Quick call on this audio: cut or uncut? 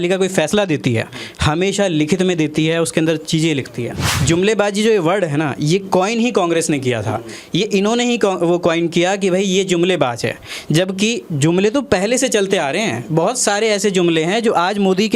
cut